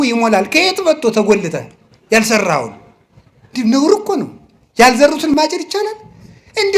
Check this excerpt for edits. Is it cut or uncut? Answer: cut